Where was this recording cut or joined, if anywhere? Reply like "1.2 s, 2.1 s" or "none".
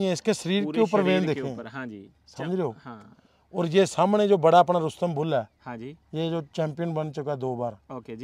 none